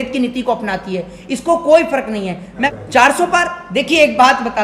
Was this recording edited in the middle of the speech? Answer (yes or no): yes